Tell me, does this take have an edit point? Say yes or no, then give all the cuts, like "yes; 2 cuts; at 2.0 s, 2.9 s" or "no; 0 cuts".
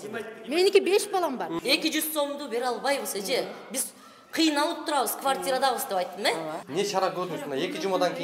yes; 2 cuts; at 1.6 s, 6.6 s